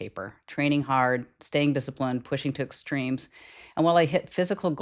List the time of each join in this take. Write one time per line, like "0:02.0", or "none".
none